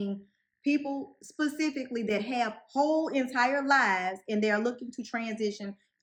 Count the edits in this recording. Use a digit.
0